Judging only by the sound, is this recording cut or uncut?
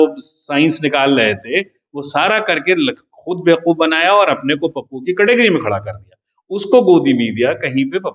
uncut